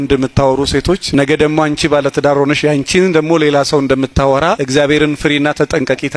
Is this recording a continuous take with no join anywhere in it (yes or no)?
no